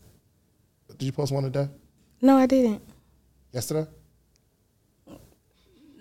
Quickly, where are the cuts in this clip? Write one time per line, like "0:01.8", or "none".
0:00.9